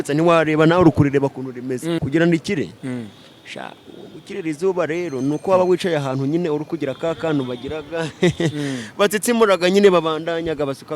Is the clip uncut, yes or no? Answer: no